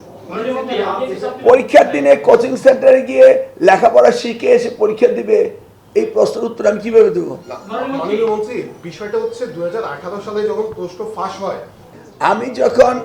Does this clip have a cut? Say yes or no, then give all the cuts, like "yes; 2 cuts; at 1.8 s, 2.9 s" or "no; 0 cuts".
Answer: yes; 1 cut; at 12.0 s